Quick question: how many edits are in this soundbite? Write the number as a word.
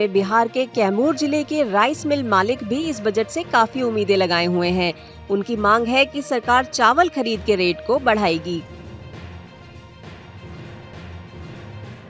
one